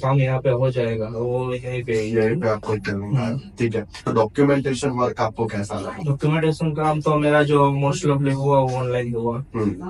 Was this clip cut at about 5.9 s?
yes; 2 cuts; at 3.9 s, 5.9 s

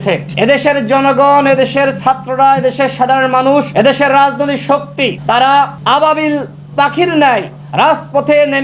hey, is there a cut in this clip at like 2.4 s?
no; 3 cuts; at 3.7 s, 5.2 s, 5.8 s

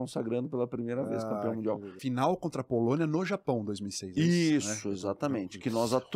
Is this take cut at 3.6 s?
no; 1 cut; at 1.9 s

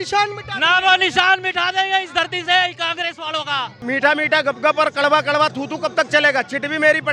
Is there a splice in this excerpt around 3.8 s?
yes; 1 cut; at 3.8 s

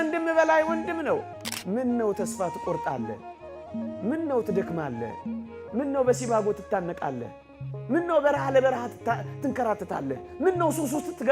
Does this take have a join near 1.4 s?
yes; 1 cut; at 1.4 s

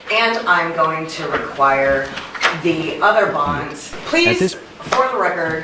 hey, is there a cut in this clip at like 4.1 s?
no; 0 cuts

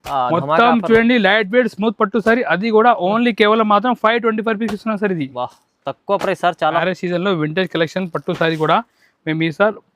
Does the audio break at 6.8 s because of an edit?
yes; 1 cut; at 6.8 s

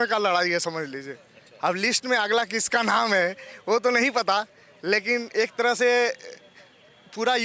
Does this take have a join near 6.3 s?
no; 0 cuts

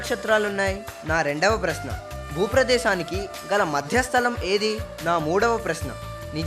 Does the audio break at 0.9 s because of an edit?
yes; 2 cuts; at 0.9 s, 4.9 s

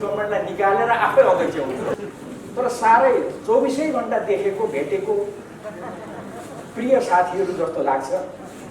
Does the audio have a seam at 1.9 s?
yes; 1 cut; at 1.9 s

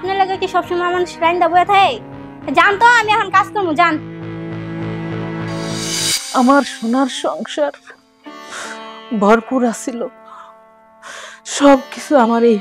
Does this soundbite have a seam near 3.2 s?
no; 1 cut; at 6.1 s

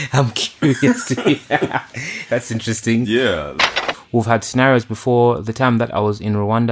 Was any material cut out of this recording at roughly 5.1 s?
no; 1 cut; at 3.7 s

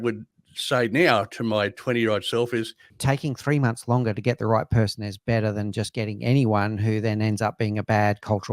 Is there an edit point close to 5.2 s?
no; 1 cut; at 2.8 s

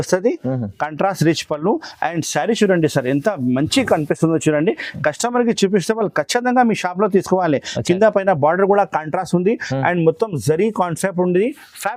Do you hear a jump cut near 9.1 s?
no; 0 cuts

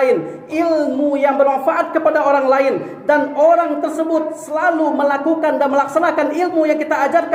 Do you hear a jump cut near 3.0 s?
no; 0 cuts

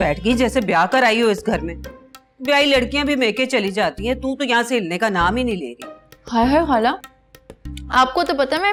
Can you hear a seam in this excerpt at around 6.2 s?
no; 0 cuts

